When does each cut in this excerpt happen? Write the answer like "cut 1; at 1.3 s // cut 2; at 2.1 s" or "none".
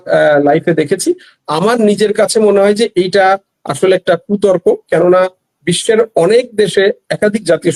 none